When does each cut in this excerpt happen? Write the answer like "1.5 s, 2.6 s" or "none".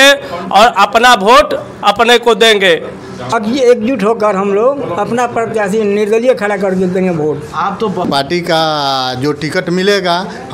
3.3 s, 8.1 s